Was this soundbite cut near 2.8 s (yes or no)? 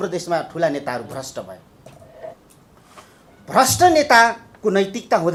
no